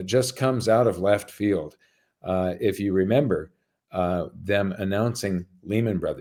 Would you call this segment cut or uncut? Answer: uncut